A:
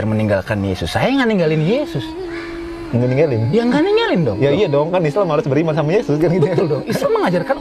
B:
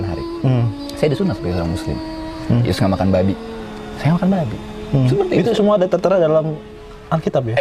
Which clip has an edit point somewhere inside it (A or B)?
A